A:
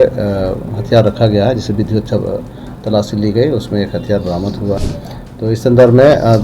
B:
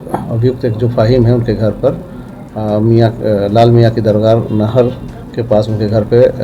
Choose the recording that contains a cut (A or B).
A